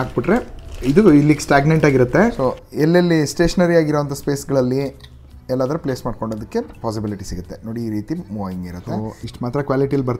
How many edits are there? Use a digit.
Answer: 2